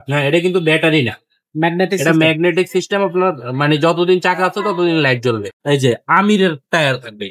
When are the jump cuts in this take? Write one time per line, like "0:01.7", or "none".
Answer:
0:05.5

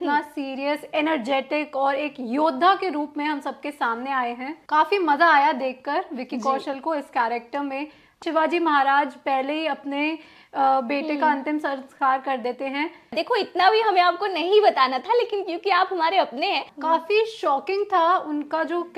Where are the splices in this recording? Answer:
0:04.5
0:08.2
0:13.1
0:16.7

